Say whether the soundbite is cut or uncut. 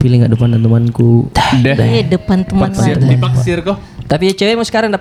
uncut